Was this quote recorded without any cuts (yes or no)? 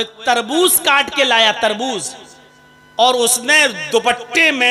yes